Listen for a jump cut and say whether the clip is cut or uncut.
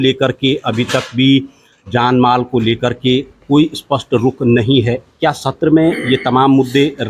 uncut